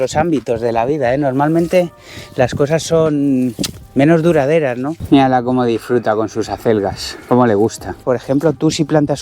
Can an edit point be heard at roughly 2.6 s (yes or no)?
no